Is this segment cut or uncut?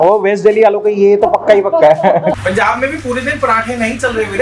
cut